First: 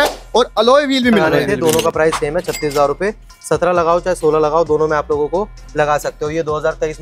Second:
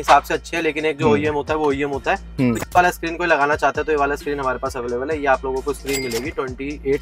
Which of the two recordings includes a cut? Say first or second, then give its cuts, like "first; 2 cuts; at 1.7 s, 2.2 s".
first; 1 cut; at 1.4 s